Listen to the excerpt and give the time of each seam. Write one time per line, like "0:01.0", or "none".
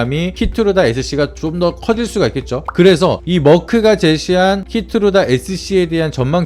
0:02.7